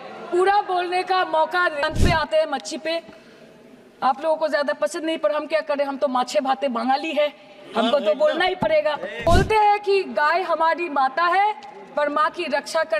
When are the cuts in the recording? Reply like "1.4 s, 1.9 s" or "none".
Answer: 1.8 s, 9.3 s